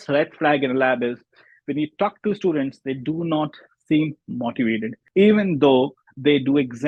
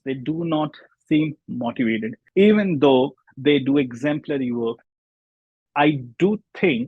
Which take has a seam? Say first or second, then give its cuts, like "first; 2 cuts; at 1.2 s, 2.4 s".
second; 1 cut; at 5.5 s